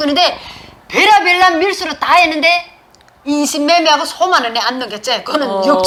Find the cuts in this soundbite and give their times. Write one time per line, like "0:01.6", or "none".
none